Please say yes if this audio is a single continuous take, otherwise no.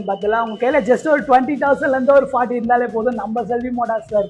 yes